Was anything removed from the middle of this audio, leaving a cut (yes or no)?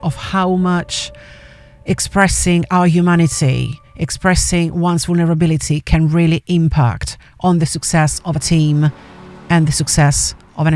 no